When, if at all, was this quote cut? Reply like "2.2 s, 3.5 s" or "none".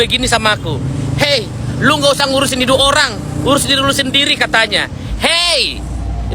none